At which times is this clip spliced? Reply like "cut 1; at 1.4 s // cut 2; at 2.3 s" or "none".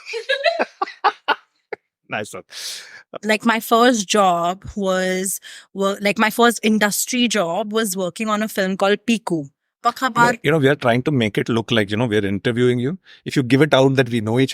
cut 1; at 3.0 s // cut 2; at 9.6 s